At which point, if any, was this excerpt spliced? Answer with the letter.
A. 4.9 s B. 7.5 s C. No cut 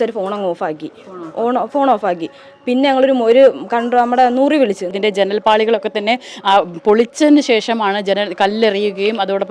A